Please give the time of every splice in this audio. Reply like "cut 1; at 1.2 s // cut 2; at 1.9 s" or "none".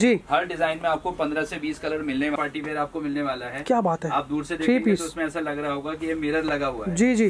cut 1; at 2.4 s